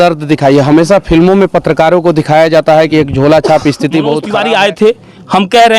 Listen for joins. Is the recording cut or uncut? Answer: cut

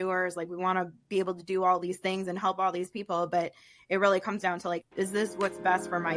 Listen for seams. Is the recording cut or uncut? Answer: cut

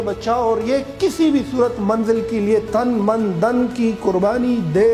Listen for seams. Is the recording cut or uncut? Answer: uncut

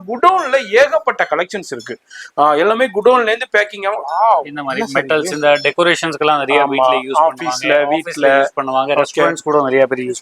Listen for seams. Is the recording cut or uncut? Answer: uncut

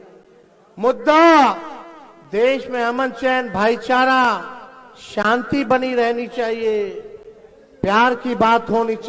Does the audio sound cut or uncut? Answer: uncut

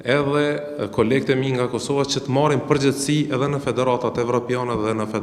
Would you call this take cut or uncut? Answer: uncut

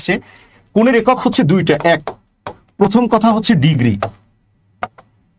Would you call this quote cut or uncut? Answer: uncut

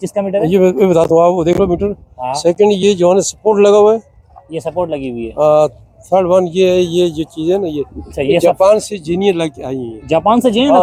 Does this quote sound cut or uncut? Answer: uncut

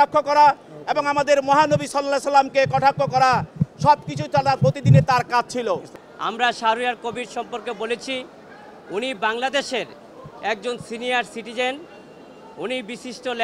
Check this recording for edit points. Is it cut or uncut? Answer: cut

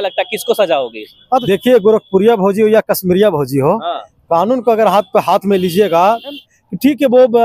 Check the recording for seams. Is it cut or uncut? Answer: cut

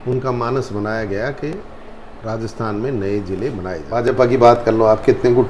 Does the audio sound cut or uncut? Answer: cut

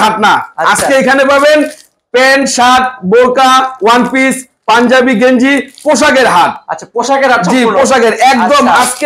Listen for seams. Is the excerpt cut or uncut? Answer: uncut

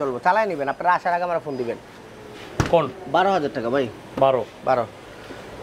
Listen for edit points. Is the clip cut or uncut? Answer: uncut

